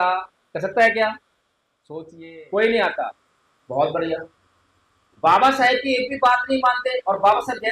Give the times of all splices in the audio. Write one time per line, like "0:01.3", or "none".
0:02.0